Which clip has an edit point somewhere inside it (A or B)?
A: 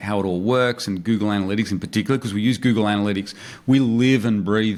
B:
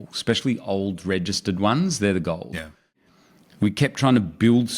B